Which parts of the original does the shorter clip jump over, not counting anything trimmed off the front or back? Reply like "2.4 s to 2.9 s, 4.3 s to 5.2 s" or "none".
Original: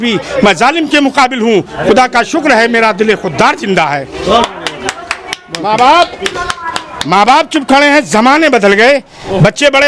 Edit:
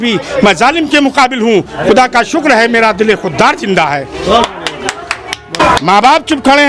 5.4 s to 6.7 s